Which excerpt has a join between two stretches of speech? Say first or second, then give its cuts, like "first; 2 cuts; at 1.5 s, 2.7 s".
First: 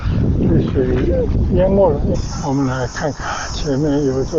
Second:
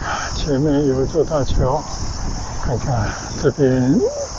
first; 1 cut; at 2.1 s